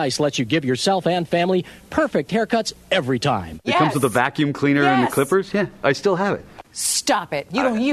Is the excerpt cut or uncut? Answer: cut